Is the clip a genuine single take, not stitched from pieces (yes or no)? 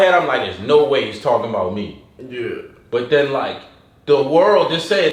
yes